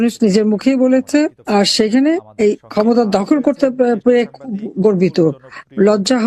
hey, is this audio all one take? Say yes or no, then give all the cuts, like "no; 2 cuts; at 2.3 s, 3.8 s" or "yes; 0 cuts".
no; 2 cuts; at 1.4 s, 2.6 s